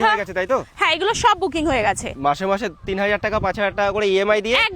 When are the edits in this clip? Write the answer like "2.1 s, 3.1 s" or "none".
2.2 s